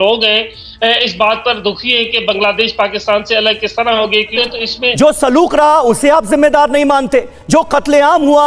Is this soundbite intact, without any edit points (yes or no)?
no